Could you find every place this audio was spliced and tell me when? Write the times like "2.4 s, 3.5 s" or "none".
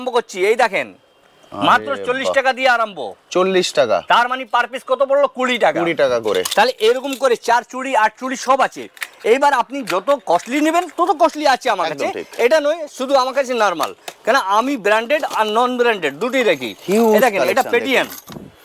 none